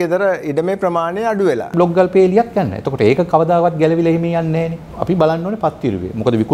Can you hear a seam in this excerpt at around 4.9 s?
yes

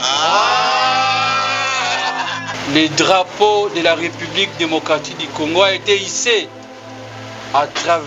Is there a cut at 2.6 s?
yes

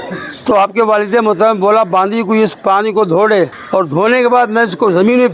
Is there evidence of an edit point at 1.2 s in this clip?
no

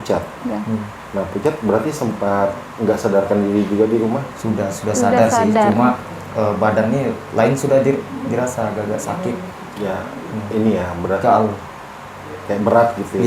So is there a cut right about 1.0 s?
yes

